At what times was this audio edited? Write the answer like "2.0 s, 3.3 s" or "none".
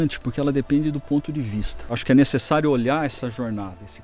1.9 s